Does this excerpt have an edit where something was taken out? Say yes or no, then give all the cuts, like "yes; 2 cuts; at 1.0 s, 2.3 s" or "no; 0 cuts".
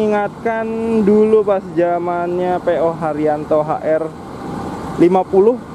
no; 0 cuts